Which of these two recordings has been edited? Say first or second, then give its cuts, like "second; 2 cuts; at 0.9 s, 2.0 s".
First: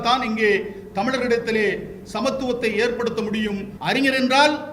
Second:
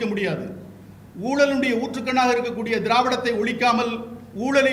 first; 1 cut; at 3.7 s